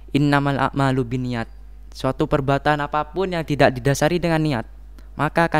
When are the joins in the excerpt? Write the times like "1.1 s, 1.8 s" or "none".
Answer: none